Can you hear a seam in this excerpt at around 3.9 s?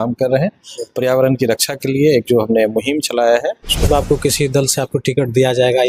yes; 1 cut; at 3.9 s

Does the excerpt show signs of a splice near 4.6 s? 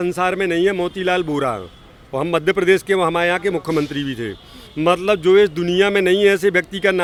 no; 0 cuts

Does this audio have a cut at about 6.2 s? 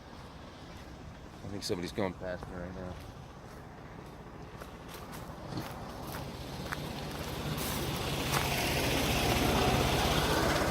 yes; 1 cut; at 6.2 s

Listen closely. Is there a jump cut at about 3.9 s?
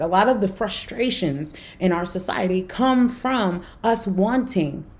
no; 0 cuts

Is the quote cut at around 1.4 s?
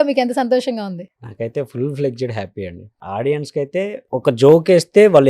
no; 2 cuts; at 2.9 s, 4.0 s

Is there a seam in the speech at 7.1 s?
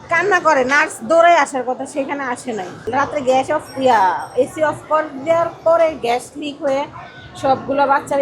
no; 1 cut; at 2.8 s

